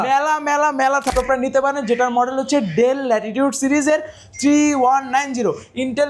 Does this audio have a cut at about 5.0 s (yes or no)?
no